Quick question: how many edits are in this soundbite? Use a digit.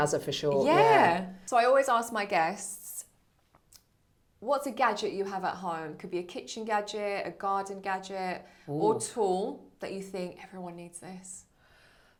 0